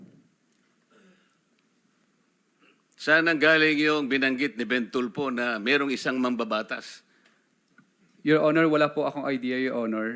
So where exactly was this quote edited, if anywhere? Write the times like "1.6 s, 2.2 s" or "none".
none